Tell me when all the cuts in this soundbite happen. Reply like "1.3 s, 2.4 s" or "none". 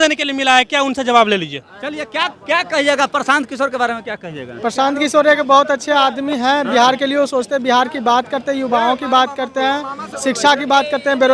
none